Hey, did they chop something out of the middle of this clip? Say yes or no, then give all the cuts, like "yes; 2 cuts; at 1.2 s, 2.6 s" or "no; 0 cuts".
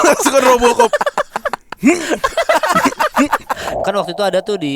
yes; 1 cut; at 3.7 s